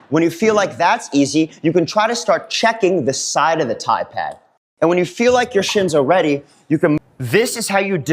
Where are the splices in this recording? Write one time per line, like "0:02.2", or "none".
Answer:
0:07.1